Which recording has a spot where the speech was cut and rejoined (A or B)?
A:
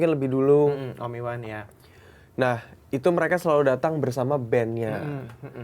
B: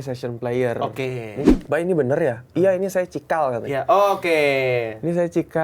B